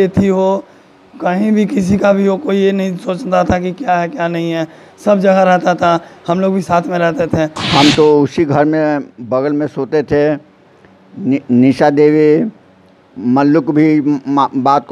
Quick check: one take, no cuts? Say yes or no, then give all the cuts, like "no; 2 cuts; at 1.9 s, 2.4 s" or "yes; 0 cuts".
no; 1 cut; at 7.6 s